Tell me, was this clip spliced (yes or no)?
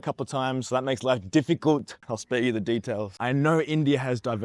yes